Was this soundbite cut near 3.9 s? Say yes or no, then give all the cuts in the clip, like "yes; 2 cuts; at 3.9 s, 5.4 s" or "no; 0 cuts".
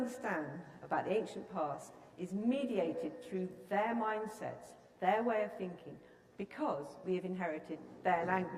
no; 1 cut; at 6.4 s